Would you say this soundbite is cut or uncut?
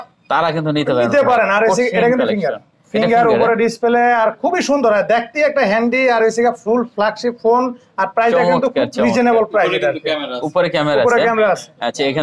uncut